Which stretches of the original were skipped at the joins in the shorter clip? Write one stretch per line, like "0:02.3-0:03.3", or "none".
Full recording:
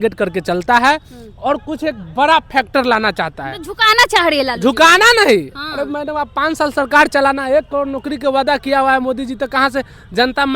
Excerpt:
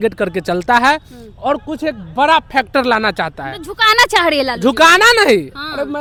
none